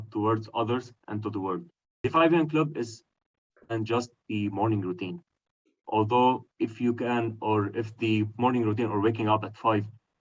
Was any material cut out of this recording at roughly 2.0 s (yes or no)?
yes